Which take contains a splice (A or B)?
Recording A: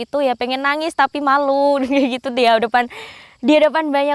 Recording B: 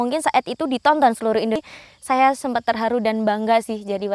B